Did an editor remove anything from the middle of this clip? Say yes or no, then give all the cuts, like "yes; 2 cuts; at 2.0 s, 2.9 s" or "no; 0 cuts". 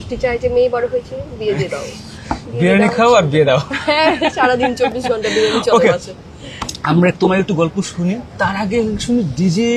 no; 0 cuts